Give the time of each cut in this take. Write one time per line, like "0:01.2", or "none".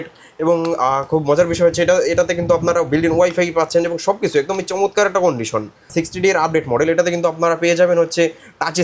0:05.9